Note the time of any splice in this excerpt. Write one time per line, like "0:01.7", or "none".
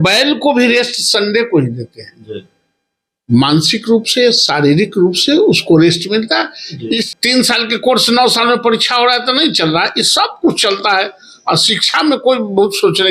0:07.1

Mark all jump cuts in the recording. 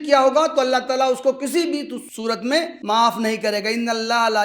0:02.5

